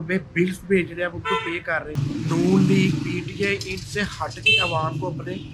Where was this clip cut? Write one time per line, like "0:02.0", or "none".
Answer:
0:01.9